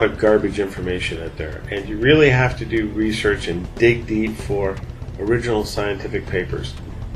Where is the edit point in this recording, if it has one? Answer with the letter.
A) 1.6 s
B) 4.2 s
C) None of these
B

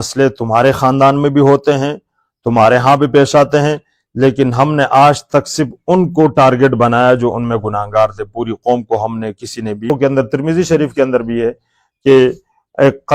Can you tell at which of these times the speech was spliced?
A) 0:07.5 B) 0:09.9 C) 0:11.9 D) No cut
B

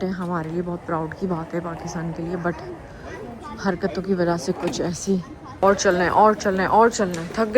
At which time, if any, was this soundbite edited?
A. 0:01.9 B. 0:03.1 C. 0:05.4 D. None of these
C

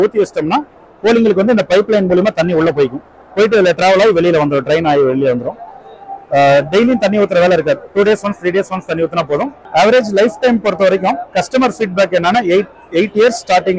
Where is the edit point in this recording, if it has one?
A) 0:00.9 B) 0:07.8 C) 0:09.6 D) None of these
C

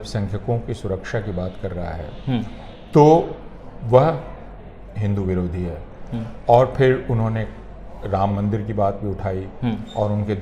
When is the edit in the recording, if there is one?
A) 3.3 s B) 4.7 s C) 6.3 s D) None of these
D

